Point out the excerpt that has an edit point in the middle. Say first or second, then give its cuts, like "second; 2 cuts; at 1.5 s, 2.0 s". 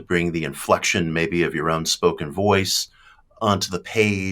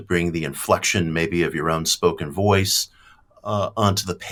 first; 1 cut; at 3.4 s